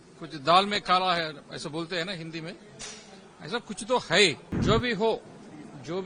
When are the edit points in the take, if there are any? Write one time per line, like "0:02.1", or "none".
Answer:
0:04.5